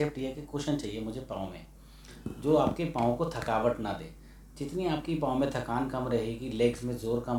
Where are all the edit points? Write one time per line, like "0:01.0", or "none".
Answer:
none